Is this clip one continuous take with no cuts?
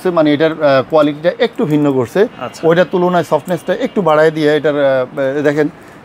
yes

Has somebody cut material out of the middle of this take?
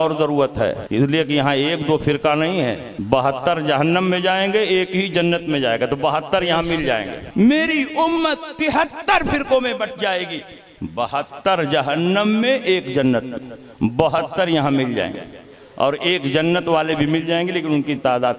yes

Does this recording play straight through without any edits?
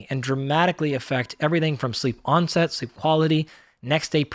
yes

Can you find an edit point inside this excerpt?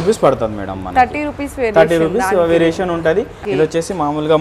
yes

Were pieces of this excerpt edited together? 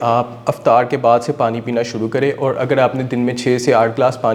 no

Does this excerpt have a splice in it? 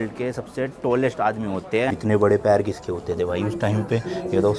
yes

